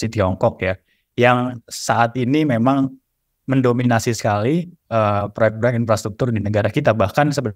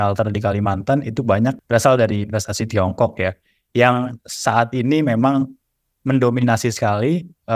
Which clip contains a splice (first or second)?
second